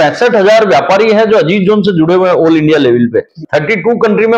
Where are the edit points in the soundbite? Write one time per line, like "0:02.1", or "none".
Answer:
0:03.4